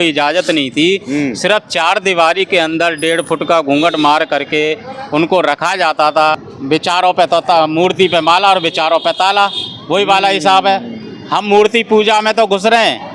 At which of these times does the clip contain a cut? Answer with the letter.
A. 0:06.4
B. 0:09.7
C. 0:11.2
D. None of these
A